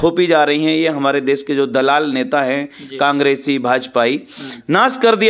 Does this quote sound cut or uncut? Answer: uncut